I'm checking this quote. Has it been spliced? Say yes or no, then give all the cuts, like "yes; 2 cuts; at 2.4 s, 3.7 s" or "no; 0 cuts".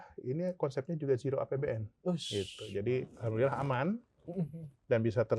no; 0 cuts